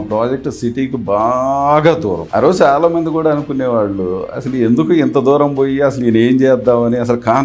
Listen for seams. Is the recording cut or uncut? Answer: cut